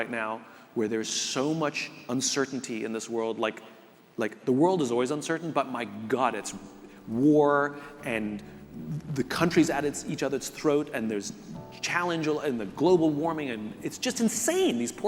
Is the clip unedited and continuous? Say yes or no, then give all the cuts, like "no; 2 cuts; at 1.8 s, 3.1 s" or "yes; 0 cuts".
yes; 0 cuts